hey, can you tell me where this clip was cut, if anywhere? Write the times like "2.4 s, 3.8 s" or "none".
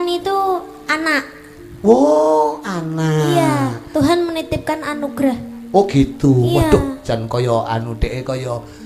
none